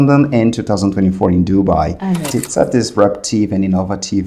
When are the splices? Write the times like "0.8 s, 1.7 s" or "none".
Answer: 2.3 s